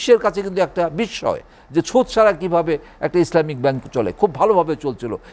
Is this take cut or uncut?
uncut